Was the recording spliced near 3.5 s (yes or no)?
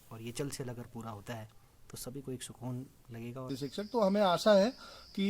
yes